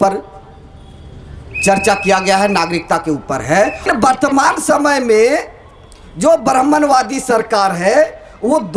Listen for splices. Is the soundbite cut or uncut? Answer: cut